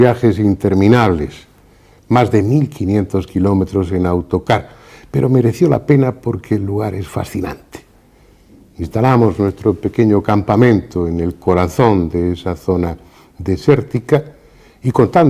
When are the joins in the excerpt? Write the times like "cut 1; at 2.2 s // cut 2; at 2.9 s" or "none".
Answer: cut 1; at 10.4 s